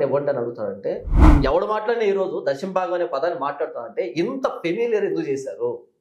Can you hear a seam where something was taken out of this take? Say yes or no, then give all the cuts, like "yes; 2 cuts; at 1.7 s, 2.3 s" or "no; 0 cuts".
yes; 1 cut; at 1.1 s